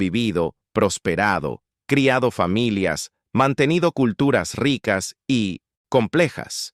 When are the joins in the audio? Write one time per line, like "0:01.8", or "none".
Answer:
0:05.7